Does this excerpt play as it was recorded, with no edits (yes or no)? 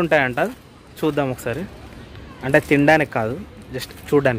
yes